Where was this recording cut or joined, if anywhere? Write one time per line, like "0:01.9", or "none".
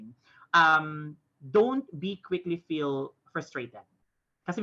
none